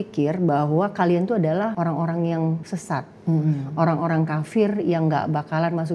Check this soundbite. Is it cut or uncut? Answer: cut